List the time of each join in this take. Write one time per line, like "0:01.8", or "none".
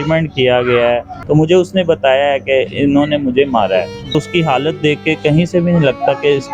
0:01.1
0:04.2